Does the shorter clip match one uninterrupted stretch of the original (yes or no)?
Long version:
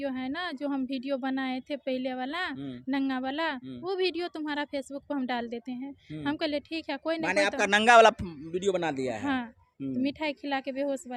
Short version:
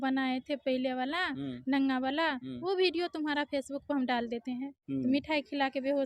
no